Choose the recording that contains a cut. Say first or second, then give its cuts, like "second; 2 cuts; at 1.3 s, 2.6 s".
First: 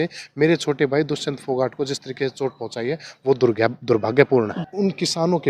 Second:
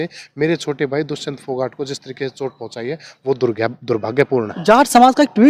first; 1 cut; at 4.6 s